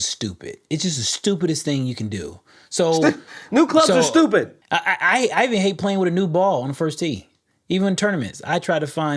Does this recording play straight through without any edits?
no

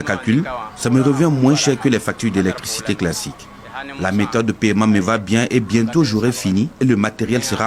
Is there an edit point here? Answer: no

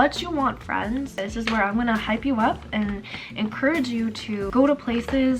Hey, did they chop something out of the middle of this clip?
yes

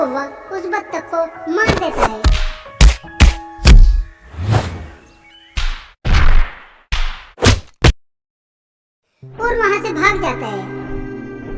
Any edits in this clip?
no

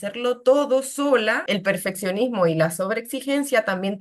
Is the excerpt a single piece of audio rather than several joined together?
no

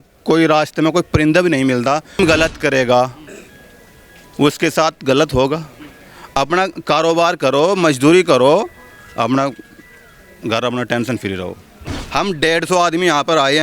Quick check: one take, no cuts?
no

